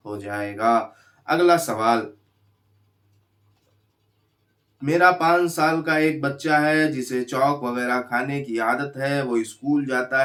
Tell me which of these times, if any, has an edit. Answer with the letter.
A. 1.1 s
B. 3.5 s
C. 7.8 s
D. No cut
D